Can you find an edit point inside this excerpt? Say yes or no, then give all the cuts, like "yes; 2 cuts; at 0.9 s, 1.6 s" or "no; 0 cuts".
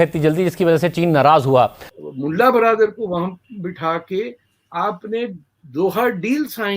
yes; 1 cut; at 1.8 s